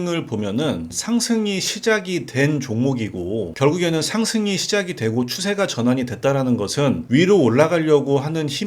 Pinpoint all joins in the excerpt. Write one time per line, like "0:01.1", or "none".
0:00.9

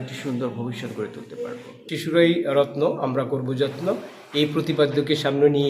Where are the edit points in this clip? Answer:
0:01.8

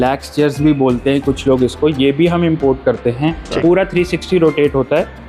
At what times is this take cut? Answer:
0:03.5

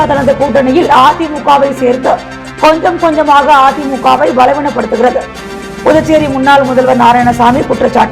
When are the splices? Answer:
none

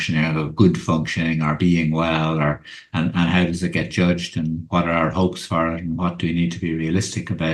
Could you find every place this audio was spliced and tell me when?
none

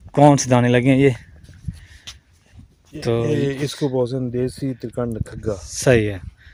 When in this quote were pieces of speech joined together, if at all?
none

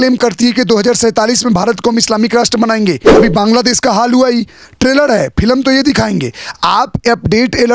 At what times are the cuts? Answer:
0:03.1

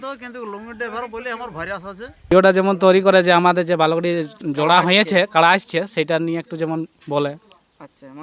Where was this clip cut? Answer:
0:02.3

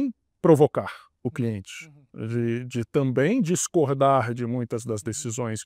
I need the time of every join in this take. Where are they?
none

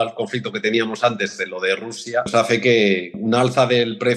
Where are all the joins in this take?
0:02.3
0:03.2

